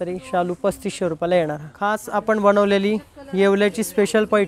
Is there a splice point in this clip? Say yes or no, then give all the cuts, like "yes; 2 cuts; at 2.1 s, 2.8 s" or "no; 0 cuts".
yes; 1 cut; at 2.0 s